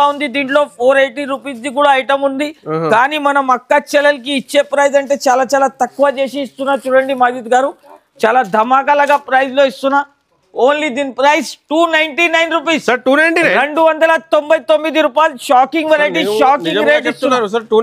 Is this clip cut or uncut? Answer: uncut